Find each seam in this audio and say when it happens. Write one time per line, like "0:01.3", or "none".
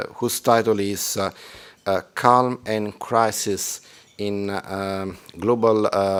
none

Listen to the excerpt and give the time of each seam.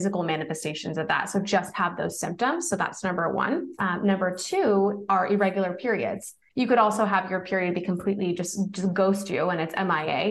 0:03.7
0:06.4

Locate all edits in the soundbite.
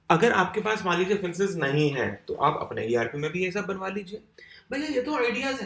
none

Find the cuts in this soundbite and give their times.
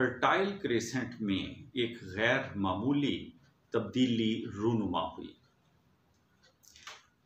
none

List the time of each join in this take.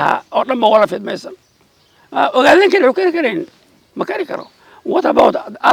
none

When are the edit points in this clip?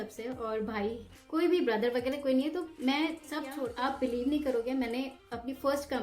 0:03.5

